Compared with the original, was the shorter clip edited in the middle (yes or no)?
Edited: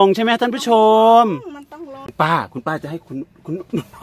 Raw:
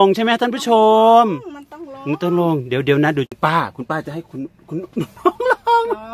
yes